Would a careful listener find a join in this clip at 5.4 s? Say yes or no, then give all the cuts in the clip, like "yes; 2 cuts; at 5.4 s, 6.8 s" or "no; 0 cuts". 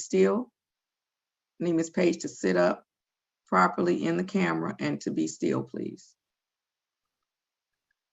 no; 0 cuts